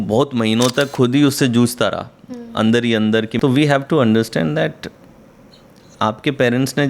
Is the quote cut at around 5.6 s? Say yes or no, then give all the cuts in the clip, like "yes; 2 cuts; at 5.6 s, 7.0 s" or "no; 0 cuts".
no; 1 cut; at 3.3 s